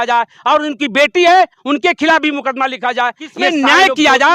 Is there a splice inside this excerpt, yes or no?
yes